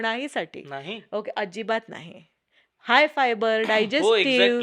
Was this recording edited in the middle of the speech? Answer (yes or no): no